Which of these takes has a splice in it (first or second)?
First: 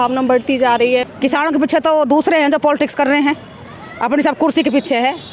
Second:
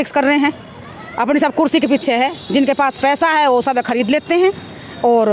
first